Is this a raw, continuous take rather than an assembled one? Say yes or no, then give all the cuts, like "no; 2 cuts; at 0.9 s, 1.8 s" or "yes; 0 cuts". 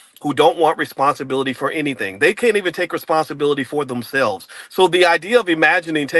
no; 1 cut; at 2.4 s